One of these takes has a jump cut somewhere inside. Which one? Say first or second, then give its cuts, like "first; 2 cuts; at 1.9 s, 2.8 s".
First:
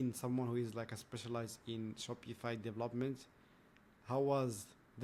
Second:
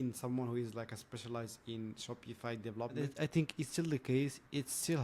second; 1 cut; at 3.0 s